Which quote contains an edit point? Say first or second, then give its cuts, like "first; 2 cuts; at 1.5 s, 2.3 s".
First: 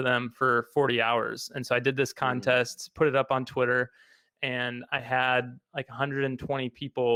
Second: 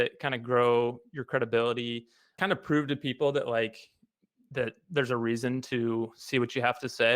second; 1 cut; at 2.3 s